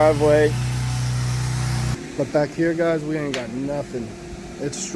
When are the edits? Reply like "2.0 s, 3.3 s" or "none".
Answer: 1.9 s